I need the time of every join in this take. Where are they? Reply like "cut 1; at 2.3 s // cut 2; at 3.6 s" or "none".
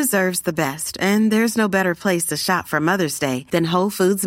none